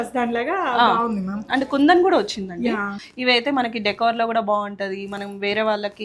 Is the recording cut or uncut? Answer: cut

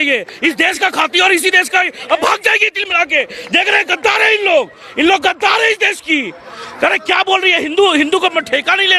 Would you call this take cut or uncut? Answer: uncut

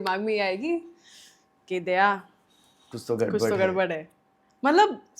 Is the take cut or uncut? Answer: uncut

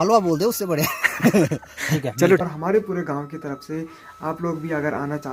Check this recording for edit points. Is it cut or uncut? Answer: cut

